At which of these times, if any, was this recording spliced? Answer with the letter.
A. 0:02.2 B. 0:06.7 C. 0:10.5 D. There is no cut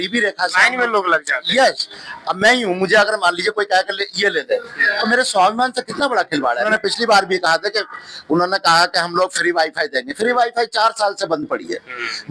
B